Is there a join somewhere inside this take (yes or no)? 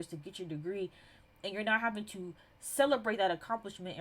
no